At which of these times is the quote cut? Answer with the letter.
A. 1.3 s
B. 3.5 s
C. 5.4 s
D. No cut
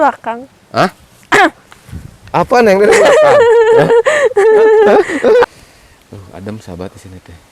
C